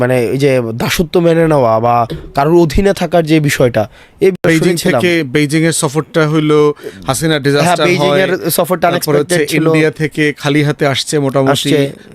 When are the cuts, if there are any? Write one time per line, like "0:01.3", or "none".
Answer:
0:04.4